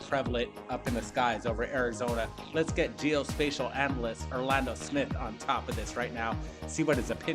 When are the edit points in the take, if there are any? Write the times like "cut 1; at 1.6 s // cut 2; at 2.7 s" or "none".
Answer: none